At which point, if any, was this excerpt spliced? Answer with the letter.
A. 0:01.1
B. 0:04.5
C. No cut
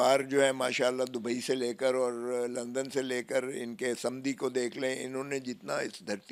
C